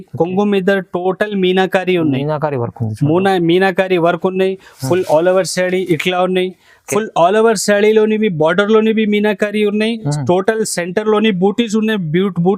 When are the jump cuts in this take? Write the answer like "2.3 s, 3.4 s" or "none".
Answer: none